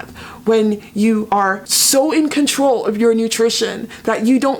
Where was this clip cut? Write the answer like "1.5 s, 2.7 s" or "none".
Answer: 1.4 s